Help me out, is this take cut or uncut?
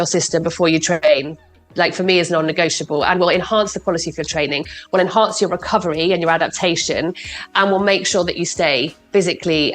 cut